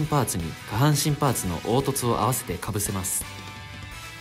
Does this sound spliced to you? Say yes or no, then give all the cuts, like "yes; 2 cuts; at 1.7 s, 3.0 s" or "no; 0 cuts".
yes; 1 cut; at 3.1 s